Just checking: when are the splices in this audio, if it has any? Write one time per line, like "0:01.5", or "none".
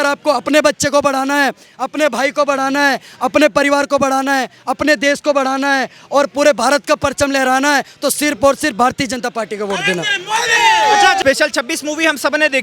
0:11.2